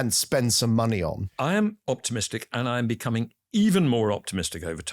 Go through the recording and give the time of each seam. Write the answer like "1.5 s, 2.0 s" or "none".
1.2 s

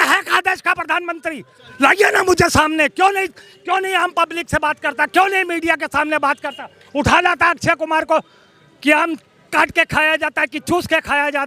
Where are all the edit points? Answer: 1.6 s

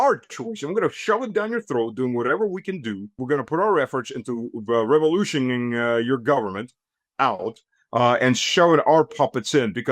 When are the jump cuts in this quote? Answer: 3.2 s

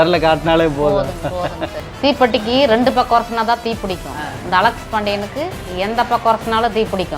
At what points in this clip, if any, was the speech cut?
1.9 s

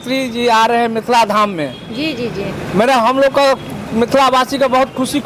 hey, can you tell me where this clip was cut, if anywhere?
none

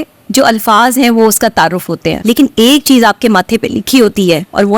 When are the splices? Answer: 2.1 s

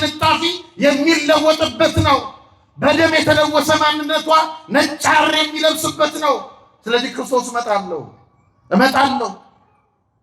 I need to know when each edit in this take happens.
none

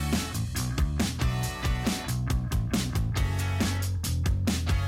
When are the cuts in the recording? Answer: 2.4 s

